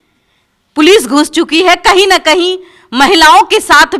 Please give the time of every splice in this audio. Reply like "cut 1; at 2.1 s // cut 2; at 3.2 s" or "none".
none